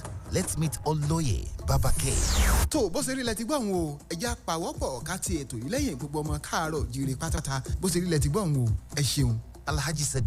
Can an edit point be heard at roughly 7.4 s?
yes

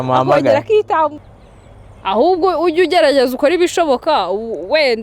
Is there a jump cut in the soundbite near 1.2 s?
yes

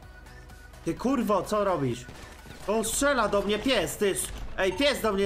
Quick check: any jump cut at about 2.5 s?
no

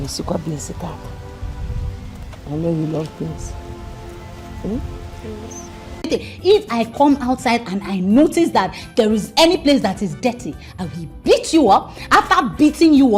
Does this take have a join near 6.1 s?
yes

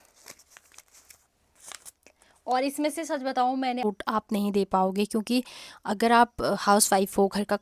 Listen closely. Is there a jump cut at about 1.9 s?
no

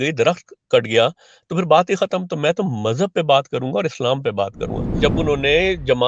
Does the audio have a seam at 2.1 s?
no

